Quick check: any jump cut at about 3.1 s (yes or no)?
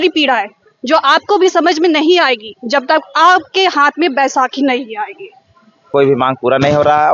no